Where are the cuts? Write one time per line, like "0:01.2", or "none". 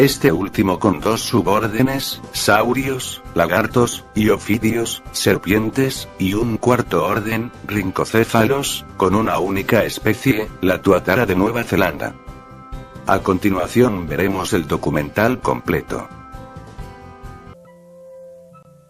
0:05.6